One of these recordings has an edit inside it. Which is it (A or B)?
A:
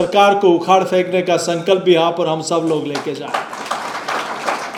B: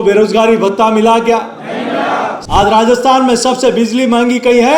B